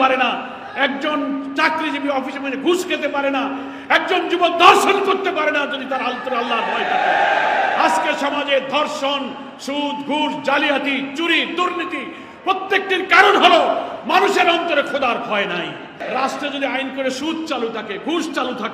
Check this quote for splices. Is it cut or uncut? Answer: cut